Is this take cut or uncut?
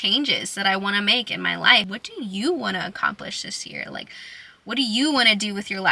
cut